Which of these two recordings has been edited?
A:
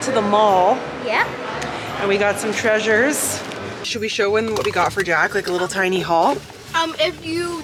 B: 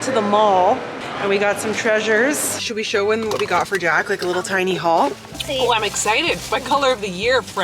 B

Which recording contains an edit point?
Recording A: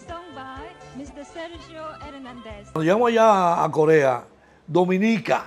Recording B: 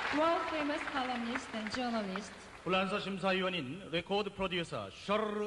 A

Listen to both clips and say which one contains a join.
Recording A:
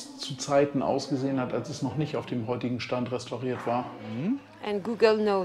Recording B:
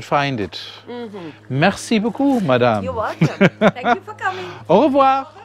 A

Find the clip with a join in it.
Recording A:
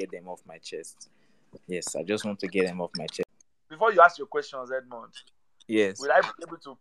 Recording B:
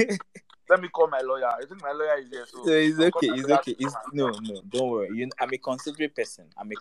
A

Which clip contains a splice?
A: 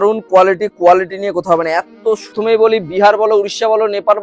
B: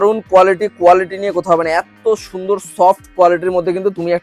A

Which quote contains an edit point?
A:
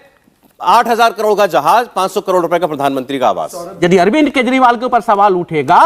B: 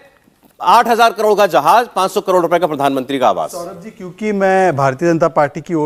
A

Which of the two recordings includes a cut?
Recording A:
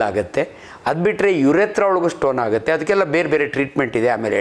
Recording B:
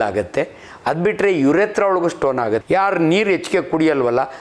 B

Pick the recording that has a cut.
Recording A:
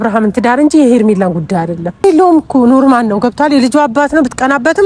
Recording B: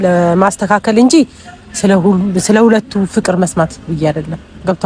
A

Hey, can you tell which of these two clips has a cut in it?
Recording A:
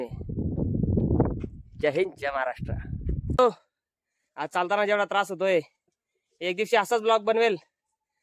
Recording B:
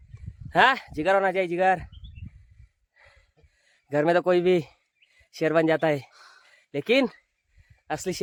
A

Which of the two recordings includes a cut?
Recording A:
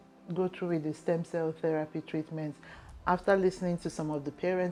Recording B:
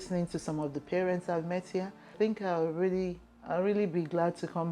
B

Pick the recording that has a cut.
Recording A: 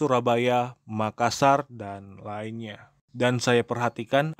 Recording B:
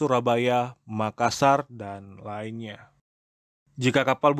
A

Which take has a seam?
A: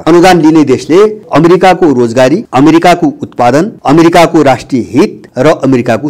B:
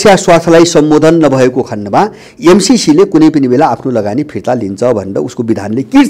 A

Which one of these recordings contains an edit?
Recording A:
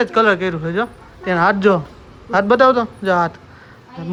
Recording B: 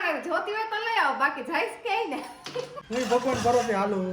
B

